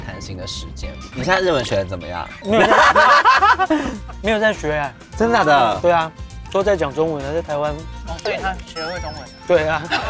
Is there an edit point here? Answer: yes; 2 cuts; at 2.4 s, 6.4 s

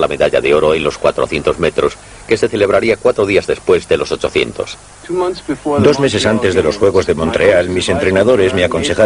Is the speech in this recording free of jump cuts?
yes; 0 cuts

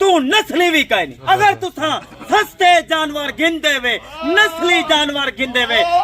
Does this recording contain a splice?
yes; 1 cut; at 1.1 s

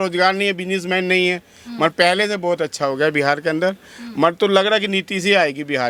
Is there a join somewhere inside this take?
no; 0 cuts

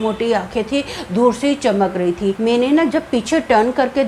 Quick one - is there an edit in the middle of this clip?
yes; 1 cut; at 2.4 s

